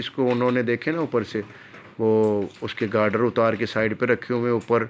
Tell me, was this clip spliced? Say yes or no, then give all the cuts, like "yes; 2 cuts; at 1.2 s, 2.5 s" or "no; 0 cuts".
no; 0 cuts